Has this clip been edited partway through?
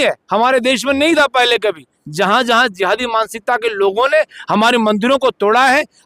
yes; 1 cut; at 2.0 s

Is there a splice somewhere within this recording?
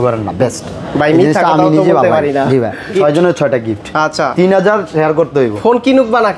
yes; 1 cut; at 2.8 s

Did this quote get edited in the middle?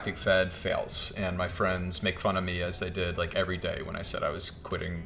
no; 0 cuts

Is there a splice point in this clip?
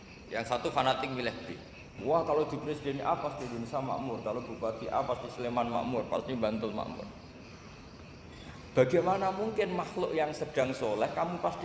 yes; 1 cut; at 1.9 s

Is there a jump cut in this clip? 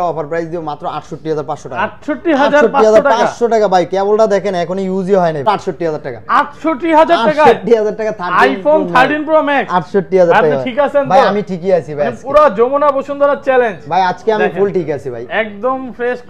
yes; 1 cut; at 5.5 s

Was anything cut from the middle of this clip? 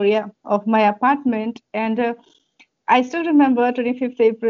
no; 0 cuts

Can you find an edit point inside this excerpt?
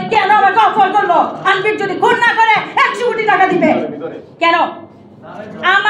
no; 0 cuts

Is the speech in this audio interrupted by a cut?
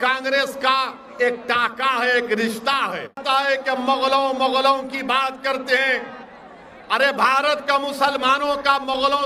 yes; 1 cut; at 3.2 s

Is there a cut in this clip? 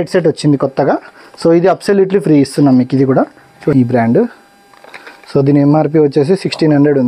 yes; 1 cut; at 3.7 s

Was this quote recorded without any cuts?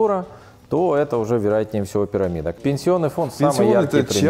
no; 1 cut; at 2.5 s

